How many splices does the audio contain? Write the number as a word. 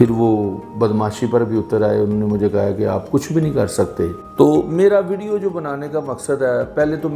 one